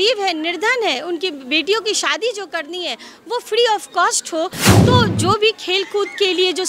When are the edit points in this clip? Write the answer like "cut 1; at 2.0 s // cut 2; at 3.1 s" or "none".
cut 1; at 4.6 s